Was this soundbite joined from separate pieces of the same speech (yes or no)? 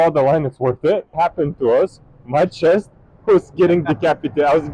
yes